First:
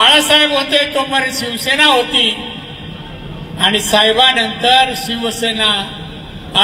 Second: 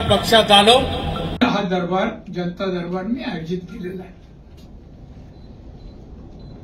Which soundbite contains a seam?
second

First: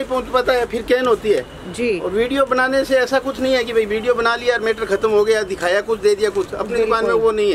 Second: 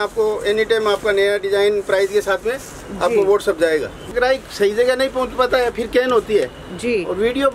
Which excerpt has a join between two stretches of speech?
second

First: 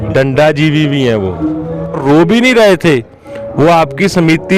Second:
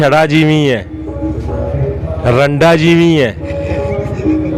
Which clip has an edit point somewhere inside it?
first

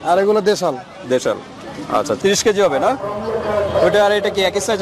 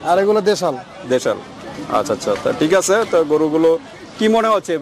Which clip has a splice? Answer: first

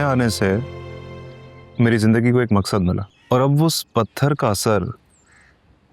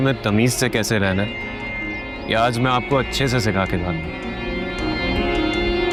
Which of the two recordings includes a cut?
first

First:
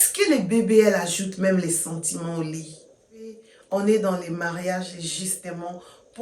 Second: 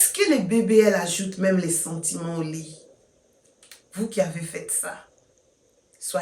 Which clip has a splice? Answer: first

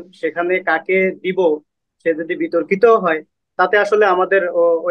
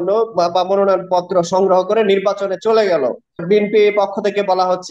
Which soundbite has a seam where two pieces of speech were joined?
second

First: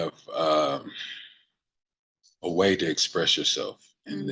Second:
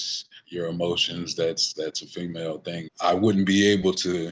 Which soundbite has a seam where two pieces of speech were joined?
second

